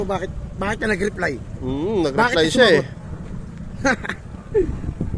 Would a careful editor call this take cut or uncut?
uncut